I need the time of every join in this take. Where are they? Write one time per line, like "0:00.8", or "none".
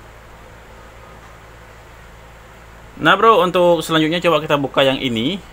0:02.9